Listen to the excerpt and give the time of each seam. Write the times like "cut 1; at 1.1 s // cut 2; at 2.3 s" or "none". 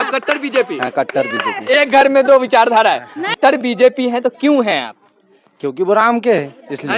cut 1; at 3.3 s